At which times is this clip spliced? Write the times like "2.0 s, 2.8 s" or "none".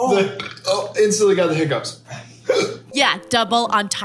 2.9 s